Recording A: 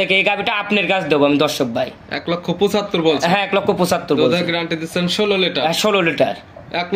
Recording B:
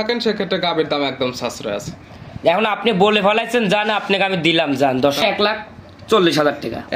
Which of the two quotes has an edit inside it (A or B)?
B